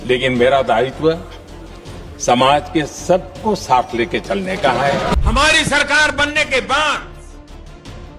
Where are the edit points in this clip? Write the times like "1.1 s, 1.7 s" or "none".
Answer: 5.1 s